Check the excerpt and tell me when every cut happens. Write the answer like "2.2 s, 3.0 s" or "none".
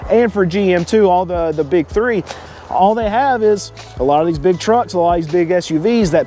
2.4 s